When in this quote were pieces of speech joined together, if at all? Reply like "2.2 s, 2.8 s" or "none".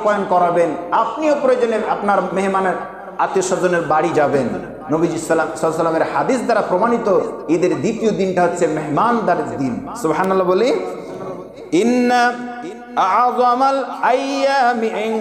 none